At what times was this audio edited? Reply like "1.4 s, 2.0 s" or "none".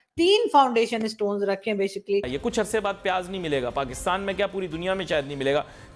2.3 s